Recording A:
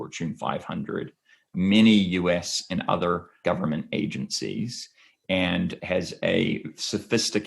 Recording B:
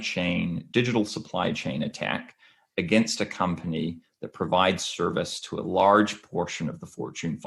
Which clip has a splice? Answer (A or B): A